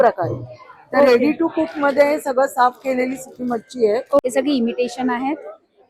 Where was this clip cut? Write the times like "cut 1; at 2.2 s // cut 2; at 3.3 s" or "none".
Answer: cut 1; at 4.2 s